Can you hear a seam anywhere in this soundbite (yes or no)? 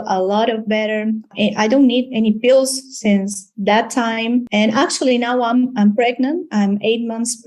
yes